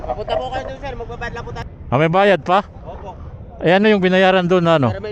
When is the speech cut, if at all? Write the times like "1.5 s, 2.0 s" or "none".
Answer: 1.6 s